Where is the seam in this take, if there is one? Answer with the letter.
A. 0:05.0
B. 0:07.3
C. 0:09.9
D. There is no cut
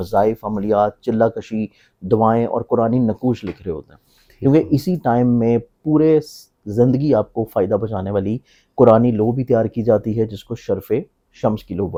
D